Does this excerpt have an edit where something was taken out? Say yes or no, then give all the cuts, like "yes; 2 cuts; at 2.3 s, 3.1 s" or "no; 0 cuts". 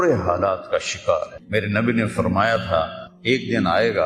yes; 2 cuts; at 1.3 s, 3.0 s